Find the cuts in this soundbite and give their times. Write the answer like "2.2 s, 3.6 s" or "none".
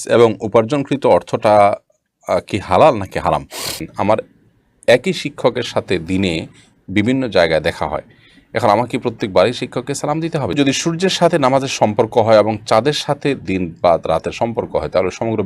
3.9 s, 10.5 s